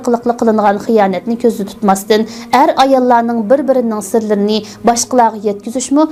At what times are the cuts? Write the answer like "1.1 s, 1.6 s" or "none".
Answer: none